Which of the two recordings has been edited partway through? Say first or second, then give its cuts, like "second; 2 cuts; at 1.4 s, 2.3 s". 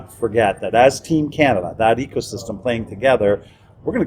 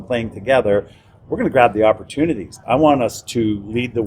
second; 1 cut; at 2.5 s